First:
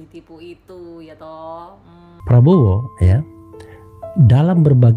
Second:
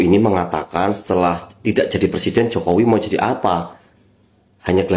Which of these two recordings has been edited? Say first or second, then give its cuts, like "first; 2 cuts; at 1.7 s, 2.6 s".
first; 1 cut; at 2.3 s